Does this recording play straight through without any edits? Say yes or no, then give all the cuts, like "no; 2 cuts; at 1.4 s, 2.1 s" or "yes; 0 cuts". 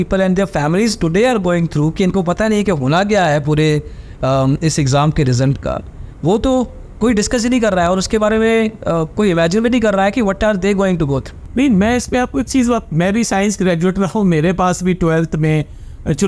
yes; 0 cuts